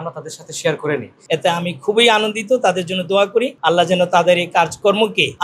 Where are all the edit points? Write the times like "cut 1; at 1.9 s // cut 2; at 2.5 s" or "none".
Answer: cut 1; at 1.2 s